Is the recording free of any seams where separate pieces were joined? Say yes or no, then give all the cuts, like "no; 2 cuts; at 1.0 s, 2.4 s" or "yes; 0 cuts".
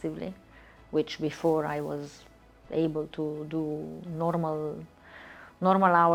yes; 0 cuts